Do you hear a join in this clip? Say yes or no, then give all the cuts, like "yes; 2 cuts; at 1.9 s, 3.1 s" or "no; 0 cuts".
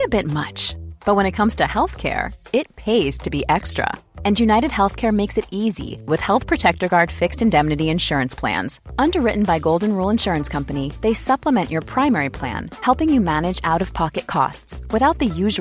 no; 0 cuts